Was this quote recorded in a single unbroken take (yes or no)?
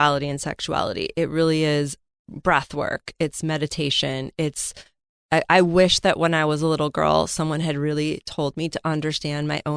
yes